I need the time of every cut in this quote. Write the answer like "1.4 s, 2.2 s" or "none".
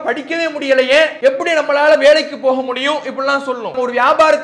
1.1 s